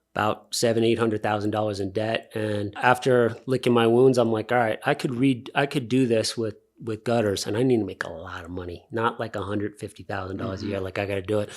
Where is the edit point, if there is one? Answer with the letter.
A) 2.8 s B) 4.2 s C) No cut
A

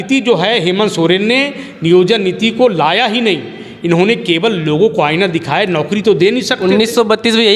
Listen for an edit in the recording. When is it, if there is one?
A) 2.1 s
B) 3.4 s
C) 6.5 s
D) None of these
D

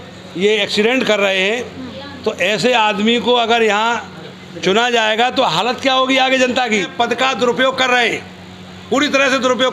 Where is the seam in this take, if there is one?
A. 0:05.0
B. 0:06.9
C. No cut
B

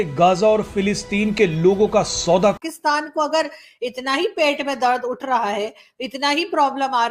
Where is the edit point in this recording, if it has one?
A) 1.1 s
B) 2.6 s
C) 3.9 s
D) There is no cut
B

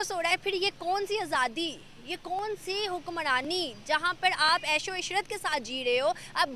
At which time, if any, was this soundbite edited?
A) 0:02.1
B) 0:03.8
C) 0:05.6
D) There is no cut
D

